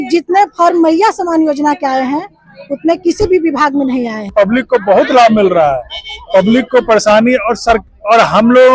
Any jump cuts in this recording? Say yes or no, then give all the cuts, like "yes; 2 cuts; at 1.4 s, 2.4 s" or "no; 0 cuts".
yes; 1 cut; at 4.3 s